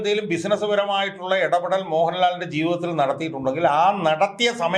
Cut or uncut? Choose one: uncut